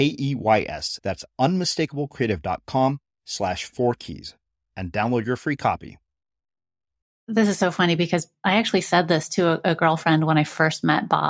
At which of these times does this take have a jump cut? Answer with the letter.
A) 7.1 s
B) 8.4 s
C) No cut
A